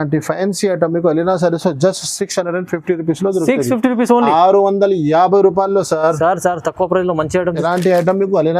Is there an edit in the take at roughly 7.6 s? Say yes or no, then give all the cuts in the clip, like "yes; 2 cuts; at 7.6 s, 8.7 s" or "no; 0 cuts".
yes; 1 cut; at 7.6 s